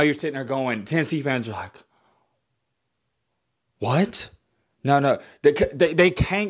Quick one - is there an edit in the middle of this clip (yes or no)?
no